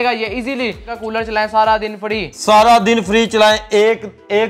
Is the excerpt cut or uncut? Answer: cut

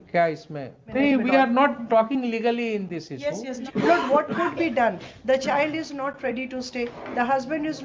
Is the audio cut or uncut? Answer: cut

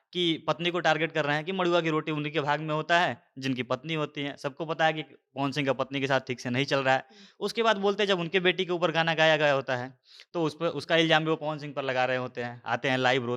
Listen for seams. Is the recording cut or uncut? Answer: uncut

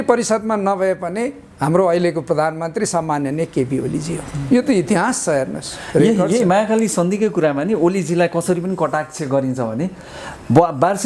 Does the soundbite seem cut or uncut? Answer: uncut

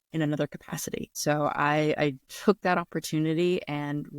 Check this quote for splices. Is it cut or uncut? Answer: cut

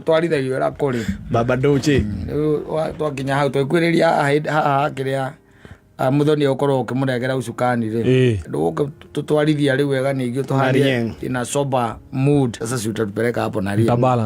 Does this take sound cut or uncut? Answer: cut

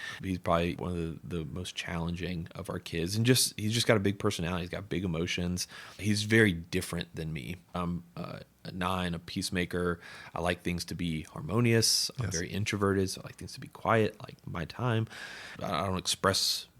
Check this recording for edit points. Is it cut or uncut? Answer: cut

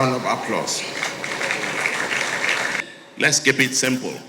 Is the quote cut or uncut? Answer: cut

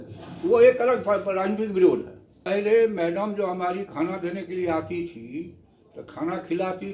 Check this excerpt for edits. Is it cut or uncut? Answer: cut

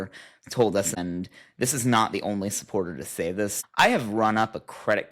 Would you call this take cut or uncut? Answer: cut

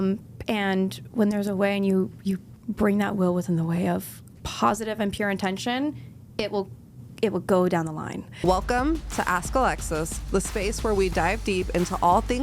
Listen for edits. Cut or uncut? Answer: cut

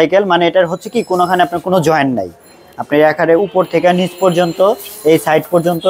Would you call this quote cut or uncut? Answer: uncut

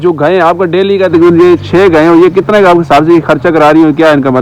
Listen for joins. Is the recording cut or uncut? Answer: uncut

